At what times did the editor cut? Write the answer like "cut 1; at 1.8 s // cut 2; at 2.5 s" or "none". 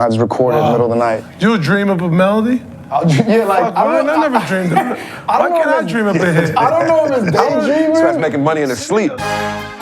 cut 1; at 8.9 s